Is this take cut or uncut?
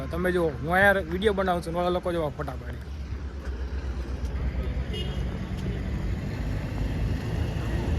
uncut